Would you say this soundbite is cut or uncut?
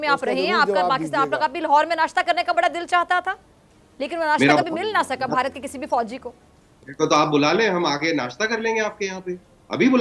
uncut